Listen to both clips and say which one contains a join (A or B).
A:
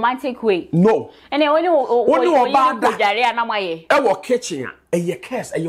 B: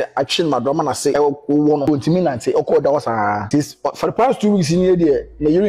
B